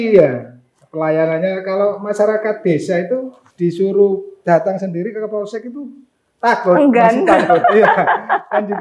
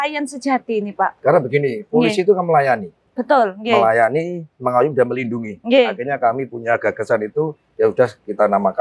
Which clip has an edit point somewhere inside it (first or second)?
first